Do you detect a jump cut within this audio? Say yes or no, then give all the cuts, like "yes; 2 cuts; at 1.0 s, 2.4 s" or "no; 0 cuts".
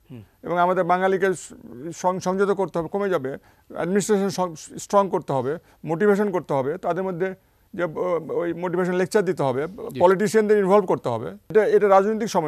yes; 1 cut; at 11.4 s